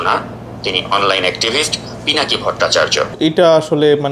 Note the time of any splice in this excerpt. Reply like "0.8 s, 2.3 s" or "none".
3.2 s

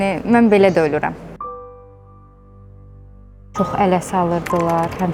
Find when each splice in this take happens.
3.5 s

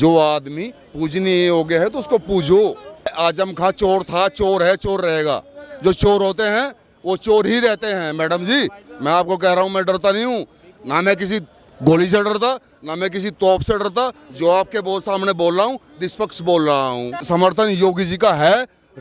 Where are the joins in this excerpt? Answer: 3.1 s, 17.2 s

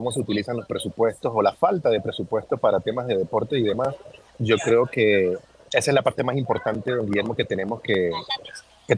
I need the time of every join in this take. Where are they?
none

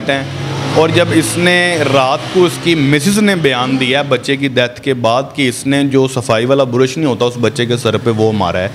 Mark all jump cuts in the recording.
none

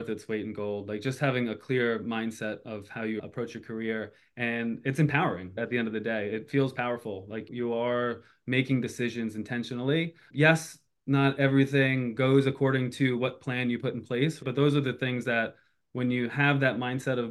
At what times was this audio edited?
3.2 s, 5.6 s, 7.5 s, 14.4 s

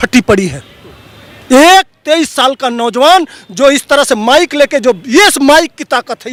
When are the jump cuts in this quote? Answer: none

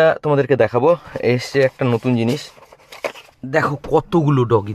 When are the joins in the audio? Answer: 3.3 s

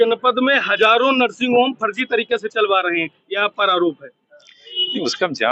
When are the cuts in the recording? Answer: none

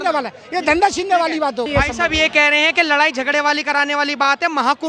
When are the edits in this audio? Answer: none

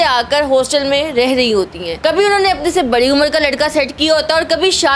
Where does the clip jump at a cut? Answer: 1.8 s

